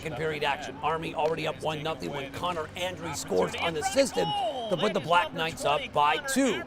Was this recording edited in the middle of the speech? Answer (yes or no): yes